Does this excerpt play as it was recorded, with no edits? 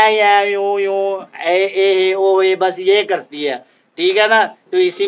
yes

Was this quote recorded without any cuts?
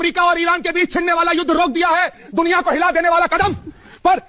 yes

